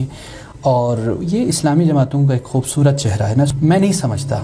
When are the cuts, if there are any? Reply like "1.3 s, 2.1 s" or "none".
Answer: 3.5 s